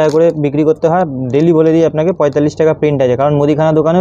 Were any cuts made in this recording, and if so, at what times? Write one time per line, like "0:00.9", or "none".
none